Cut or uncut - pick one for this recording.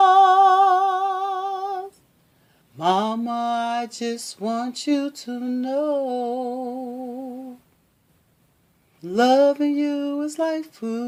uncut